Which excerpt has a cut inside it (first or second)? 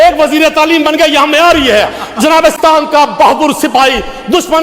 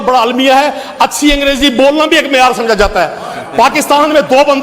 first